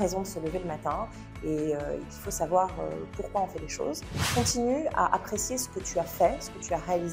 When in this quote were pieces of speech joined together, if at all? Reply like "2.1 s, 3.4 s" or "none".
4.2 s